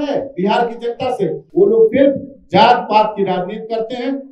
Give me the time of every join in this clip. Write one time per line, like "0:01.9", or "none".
0:01.4